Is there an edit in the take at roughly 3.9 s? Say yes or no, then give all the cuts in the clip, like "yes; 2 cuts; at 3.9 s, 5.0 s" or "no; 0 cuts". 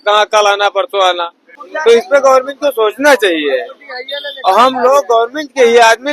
no; 1 cut; at 1.6 s